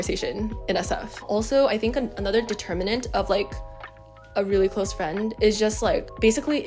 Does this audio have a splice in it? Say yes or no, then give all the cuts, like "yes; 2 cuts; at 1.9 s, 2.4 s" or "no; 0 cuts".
yes; 1 cut; at 1.3 s